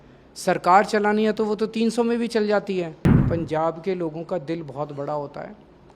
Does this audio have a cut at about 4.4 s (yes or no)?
no